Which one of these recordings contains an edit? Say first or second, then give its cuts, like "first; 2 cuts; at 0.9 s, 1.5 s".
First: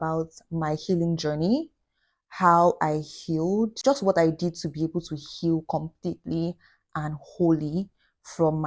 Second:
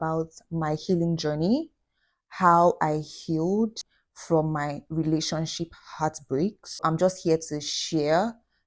second; 2 cuts; at 3.8 s, 6.7 s